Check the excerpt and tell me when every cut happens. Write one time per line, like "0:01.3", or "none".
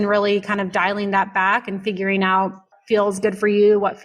0:02.7

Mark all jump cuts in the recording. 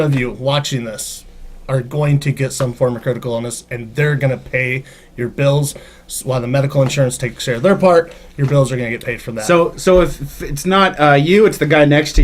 none

